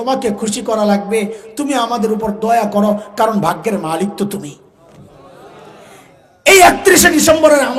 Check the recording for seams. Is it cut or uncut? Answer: uncut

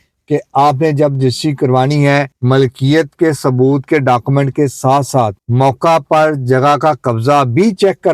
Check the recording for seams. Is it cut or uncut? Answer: uncut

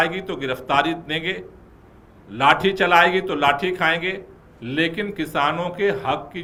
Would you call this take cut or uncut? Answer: uncut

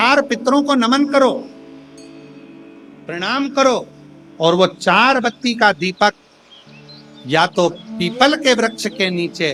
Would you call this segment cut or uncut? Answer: uncut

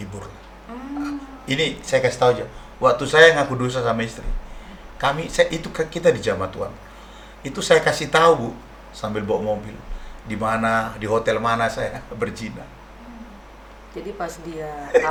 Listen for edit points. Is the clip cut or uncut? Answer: uncut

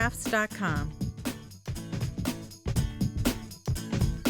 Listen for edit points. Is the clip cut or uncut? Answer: cut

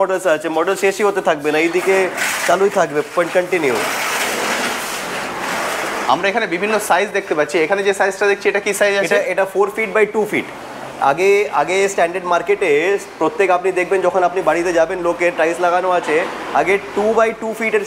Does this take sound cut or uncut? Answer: uncut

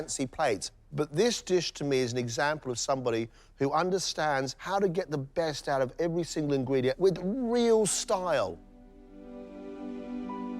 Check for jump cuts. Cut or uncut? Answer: cut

